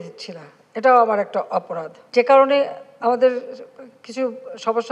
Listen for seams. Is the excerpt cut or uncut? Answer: cut